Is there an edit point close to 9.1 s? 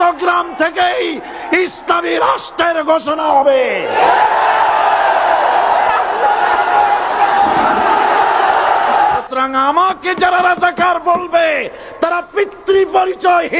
yes; 1 cut; at 9.1 s

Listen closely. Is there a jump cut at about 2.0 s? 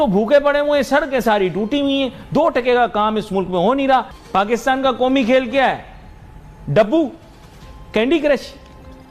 no; 1 cut; at 4.2 s

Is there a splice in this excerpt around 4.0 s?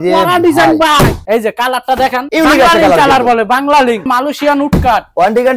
yes; 2 cuts; at 1.2 s, 4.0 s

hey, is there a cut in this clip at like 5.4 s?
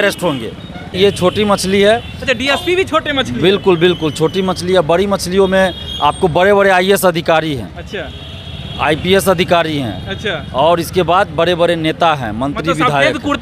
no; 1 cut; at 1.0 s

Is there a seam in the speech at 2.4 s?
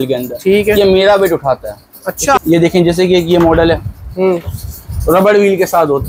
yes; 1 cut; at 2.4 s

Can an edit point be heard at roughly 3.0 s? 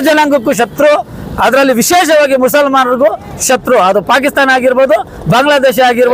no; 0 cuts

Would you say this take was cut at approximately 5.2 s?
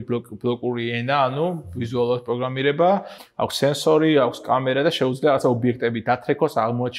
no; 1 cut; at 3.2 s

